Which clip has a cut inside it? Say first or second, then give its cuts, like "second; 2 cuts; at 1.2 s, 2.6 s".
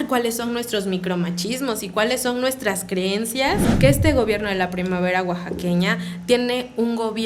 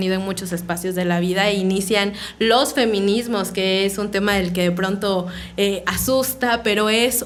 first; 1 cut; at 3.7 s